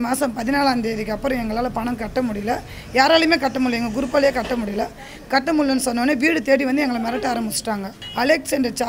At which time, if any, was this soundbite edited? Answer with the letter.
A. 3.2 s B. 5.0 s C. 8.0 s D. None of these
C